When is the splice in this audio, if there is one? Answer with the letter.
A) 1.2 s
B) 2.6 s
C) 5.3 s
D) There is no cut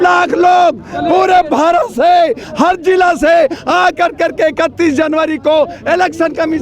D